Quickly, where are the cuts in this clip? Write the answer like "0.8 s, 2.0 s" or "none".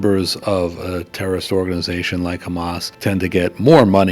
2.8 s